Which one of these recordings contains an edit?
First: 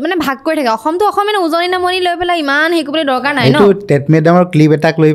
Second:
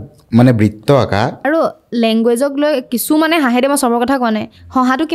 second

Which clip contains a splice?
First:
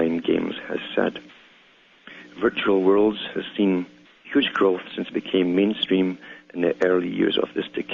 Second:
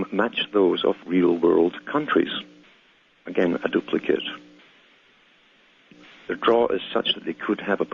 first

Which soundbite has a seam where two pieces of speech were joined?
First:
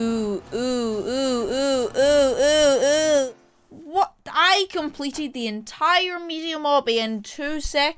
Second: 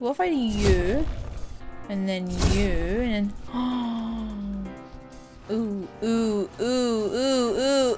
first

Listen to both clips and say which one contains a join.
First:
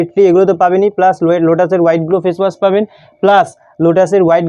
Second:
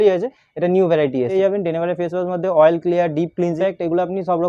second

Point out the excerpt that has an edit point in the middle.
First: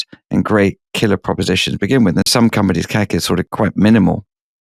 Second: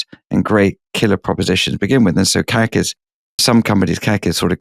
first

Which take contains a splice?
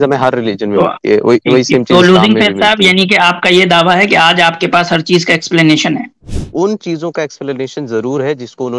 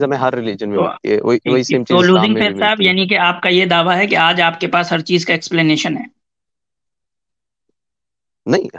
first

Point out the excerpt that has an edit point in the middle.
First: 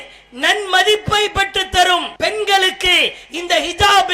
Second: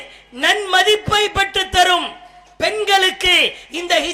first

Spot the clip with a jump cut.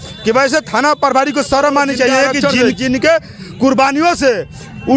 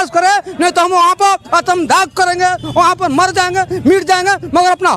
first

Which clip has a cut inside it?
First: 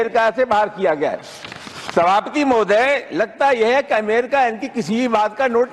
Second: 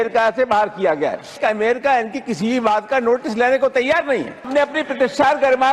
second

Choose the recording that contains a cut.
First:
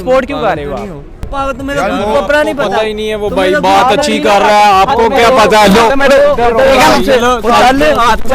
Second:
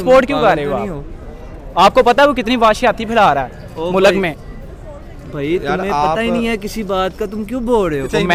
first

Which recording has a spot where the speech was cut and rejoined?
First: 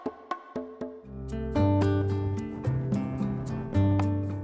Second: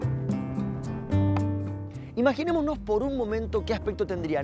first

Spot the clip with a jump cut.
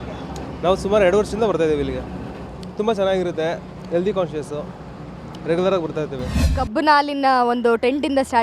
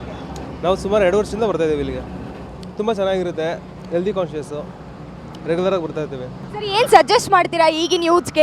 first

